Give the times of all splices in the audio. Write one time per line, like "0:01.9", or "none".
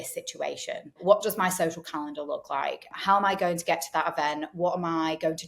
0:01.0
0:02.9